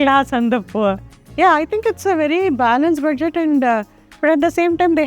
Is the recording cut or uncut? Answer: cut